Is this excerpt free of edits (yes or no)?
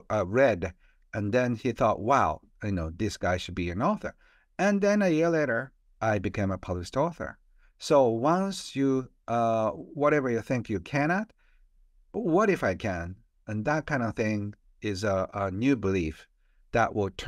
yes